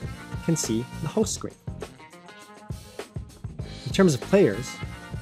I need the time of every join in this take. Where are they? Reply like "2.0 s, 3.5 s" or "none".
none